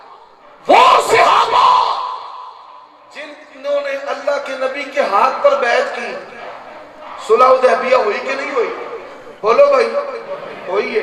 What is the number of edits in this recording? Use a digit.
0